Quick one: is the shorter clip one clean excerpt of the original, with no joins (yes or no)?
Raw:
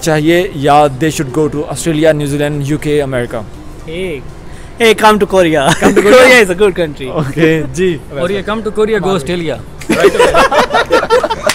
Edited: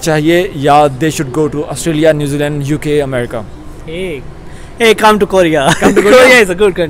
yes